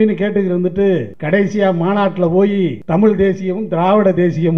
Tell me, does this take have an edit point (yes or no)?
yes